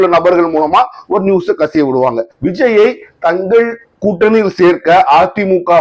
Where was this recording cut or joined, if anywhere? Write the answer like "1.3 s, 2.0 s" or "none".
2.3 s